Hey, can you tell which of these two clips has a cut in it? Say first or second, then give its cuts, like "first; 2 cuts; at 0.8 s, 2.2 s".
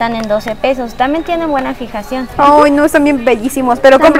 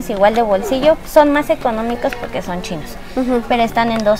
first; 1 cut; at 2.2 s